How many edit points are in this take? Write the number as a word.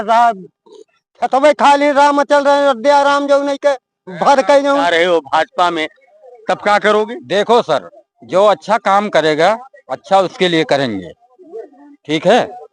one